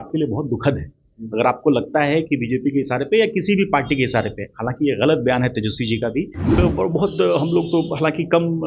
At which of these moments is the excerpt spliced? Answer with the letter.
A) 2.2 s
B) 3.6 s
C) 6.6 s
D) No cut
C